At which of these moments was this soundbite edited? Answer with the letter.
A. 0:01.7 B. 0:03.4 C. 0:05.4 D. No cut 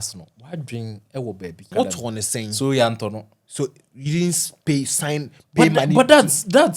A